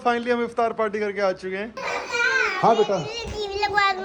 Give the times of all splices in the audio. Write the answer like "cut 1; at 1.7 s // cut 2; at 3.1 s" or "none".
cut 1; at 1.8 s